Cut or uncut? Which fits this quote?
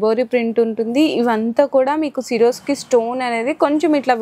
uncut